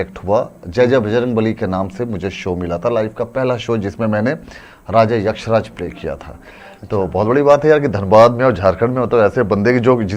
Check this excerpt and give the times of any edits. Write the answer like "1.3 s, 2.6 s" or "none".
none